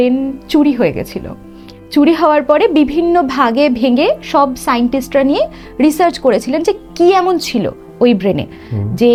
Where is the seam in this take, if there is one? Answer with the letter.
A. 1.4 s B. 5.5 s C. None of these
C